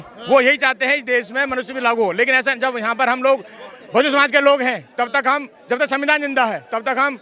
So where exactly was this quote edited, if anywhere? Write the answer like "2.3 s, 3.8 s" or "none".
none